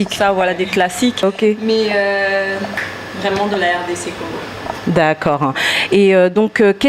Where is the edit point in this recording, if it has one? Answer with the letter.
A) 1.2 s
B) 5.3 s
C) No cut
A